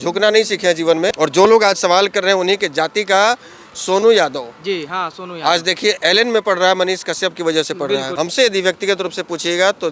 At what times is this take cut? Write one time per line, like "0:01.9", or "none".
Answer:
0:01.1
0:08.1